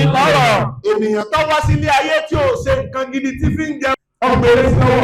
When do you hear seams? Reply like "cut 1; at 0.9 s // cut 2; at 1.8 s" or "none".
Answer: cut 1; at 3.9 s